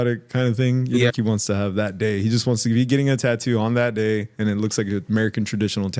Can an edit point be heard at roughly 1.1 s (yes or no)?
yes